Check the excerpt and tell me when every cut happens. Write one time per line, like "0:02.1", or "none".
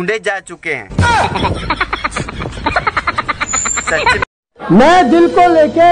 0:04.5

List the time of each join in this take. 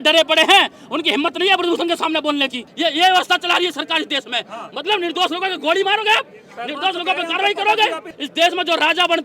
0:02.7
0:08.2

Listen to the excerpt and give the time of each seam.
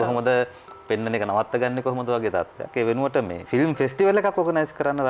0:03.4

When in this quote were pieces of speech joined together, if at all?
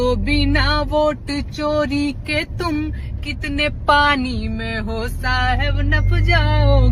none

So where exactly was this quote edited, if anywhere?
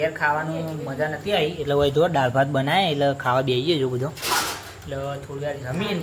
none

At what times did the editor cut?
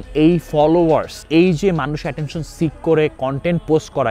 0:01.2

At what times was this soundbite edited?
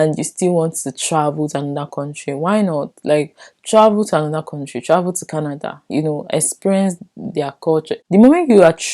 0:08.0

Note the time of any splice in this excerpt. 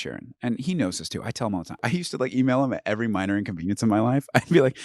0:01.8

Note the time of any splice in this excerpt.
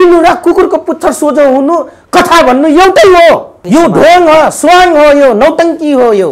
0:03.5

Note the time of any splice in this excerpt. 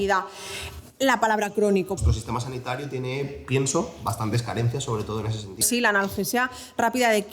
0:02.0
0:05.6

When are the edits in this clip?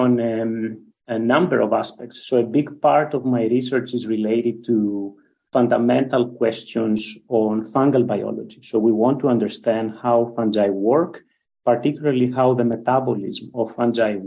none

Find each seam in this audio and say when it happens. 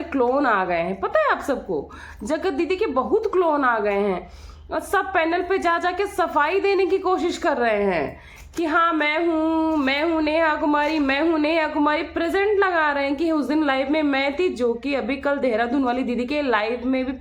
none

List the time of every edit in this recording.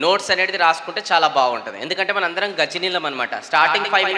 none

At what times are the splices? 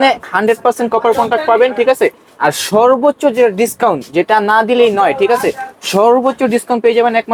none

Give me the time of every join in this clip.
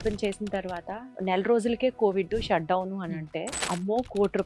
0:01.0
0:03.6

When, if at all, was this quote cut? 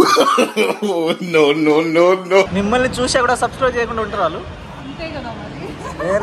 0:02.5

